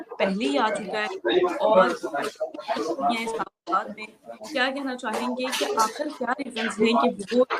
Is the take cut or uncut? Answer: uncut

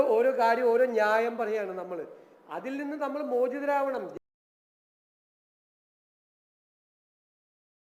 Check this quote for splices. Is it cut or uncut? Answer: uncut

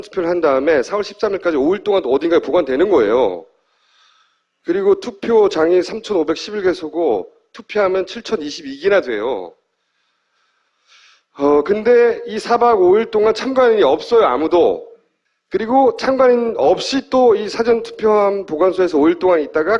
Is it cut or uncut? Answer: cut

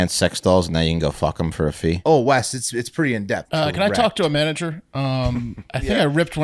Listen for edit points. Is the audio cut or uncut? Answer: cut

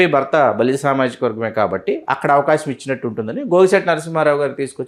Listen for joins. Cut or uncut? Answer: uncut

